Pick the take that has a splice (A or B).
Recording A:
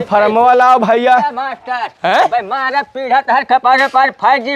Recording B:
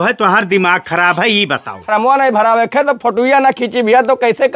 B